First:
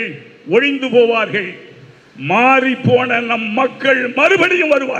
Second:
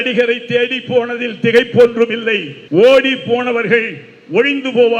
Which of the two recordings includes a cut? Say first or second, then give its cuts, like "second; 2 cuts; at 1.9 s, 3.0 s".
second; 1 cut; at 2.5 s